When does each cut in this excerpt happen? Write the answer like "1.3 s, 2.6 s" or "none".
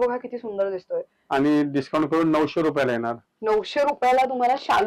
1.1 s